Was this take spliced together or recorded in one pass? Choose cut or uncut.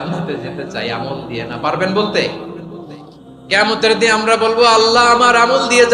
uncut